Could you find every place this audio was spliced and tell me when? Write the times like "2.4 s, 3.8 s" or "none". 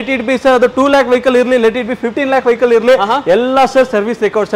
none